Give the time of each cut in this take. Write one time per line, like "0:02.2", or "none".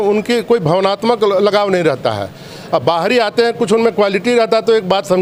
none